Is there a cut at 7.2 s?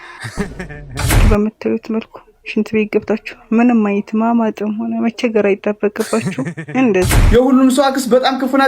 yes; 2 cuts; at 1.2 s, 7.2 s

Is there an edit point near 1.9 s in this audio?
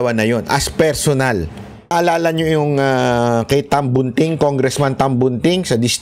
yes; 1 cut; at 1.9 s

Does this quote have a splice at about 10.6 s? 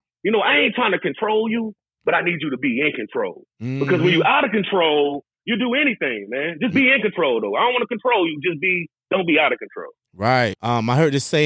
yes; 1 cut; at 10.6 s

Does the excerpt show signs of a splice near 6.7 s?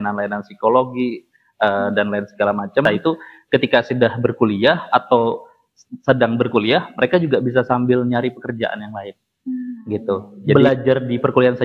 no; 2 cuts; at 2.8 s, 10.5 s

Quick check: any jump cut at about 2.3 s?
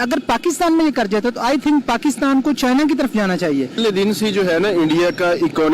no; 1 cut; at 3.8 s

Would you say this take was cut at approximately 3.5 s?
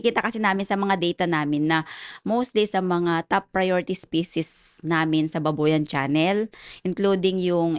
no; 0 cuts

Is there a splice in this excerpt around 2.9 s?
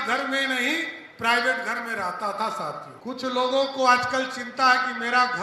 yes; 1 cut; at 2.9 s

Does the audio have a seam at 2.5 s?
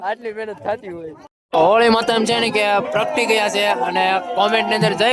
no; 1 cut; at 1.1 s

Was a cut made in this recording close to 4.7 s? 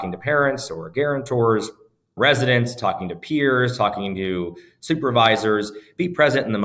no; 0 cuts

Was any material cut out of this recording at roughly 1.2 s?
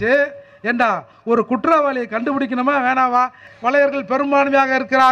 no; 1 cut; at 3.5 s

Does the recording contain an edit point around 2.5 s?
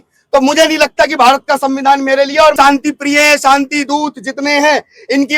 yes; 1 cut; at 2.5 s

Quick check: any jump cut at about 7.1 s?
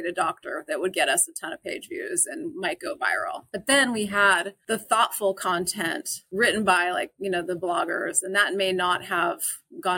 no; 0 cuts

